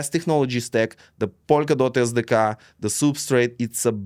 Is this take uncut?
yes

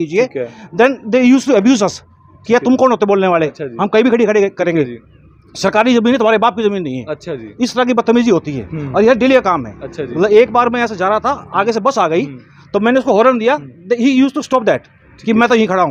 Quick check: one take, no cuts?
yes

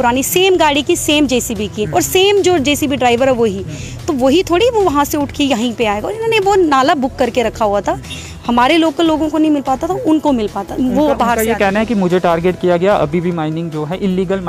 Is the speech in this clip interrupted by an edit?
no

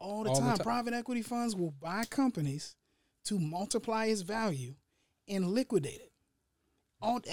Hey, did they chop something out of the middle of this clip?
no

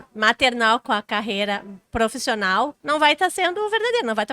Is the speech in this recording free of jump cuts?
no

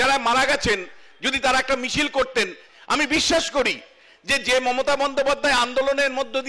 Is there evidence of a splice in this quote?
yes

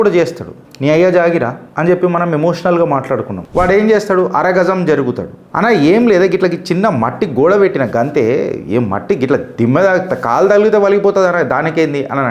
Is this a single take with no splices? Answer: no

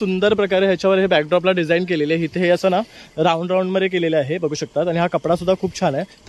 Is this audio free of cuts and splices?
yes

